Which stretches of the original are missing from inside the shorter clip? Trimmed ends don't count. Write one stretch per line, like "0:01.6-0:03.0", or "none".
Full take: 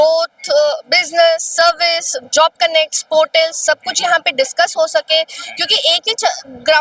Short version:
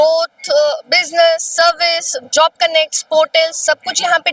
none